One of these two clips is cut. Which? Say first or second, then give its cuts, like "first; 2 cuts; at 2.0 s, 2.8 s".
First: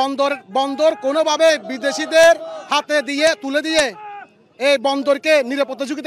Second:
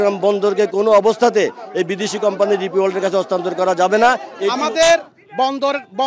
second; 1 cut; at 4.4 s